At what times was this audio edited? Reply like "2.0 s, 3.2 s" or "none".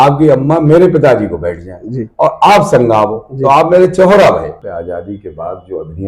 4.6 s

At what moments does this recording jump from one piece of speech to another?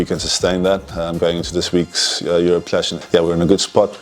3.0 s

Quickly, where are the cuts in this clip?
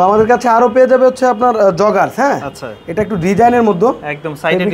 none

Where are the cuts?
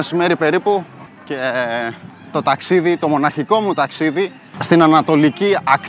none

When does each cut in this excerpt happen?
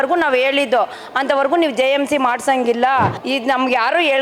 3.2 s

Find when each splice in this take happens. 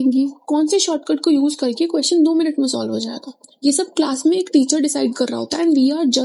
none

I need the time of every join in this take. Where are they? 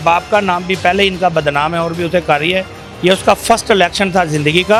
none

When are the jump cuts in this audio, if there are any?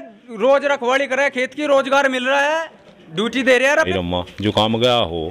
3.9 s

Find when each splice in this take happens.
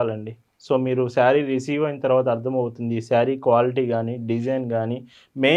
none

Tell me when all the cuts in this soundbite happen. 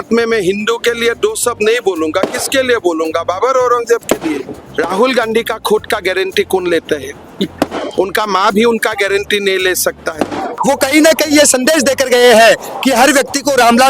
4.5 s, 10.6 s

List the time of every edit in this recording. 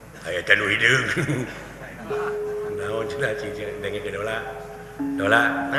none

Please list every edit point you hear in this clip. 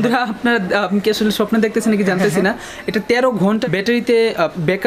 none

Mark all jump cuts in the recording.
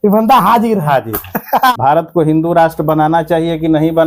1.7 s

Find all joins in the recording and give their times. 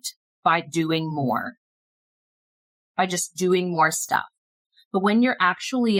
none

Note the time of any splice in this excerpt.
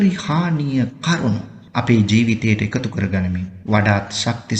1.6 s, 3.5 s

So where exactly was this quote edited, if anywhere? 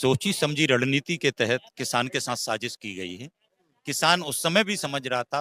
none

